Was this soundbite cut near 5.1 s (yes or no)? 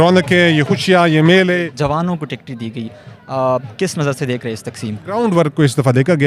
yes